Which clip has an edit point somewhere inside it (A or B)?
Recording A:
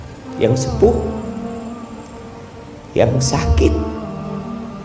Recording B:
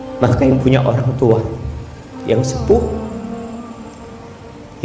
A